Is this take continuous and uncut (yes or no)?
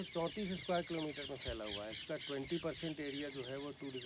yes